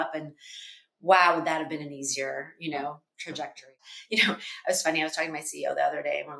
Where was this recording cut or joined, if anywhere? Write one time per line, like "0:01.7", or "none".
0:03.9